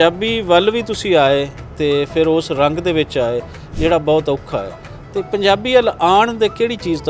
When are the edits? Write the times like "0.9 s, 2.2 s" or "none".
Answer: none